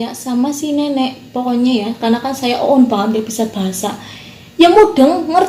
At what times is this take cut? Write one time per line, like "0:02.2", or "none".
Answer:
none